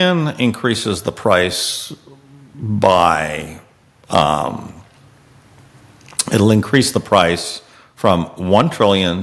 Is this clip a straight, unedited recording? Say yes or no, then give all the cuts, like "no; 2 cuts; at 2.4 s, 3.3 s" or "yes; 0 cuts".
yes; 0 cuts